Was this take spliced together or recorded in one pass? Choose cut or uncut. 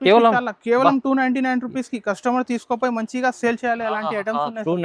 uncut